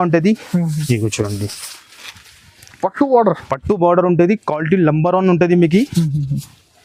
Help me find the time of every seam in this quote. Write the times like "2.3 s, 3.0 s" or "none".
none

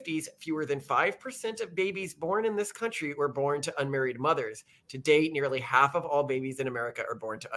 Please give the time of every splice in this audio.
none

